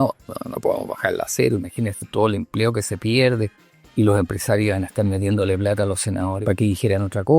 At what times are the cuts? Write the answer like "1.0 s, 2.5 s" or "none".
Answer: 6.4 s